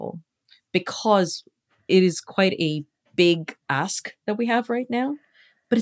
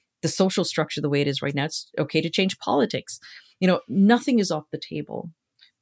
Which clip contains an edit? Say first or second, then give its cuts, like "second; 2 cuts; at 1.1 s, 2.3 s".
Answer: first; 1 cut; at 1.9 s